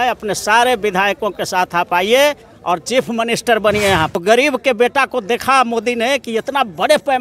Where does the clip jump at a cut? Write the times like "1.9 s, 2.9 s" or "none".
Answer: 4.1 s